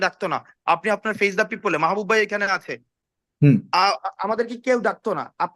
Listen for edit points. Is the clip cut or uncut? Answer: cut